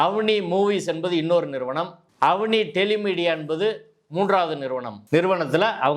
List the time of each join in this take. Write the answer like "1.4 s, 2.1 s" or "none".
2.0 s, 4.9 s